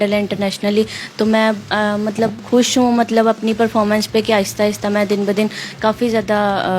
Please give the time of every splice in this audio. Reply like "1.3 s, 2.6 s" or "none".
none